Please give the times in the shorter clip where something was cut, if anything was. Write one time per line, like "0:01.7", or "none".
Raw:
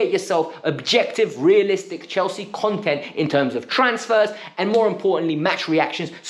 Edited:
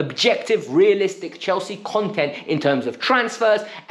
none